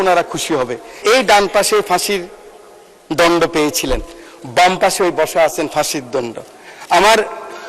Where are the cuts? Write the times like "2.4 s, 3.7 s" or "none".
0.9 s